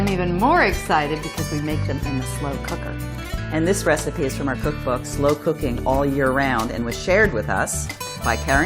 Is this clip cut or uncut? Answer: cut